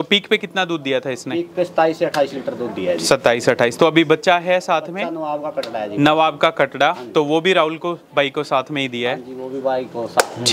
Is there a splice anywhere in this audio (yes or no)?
no